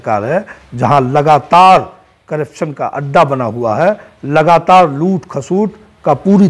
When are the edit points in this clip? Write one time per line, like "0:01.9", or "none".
none